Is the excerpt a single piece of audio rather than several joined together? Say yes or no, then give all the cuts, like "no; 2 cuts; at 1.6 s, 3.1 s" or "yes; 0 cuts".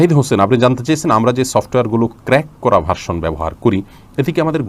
yes; 0 cuts